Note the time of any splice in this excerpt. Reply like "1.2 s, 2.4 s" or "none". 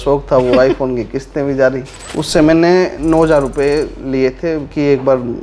2.0 s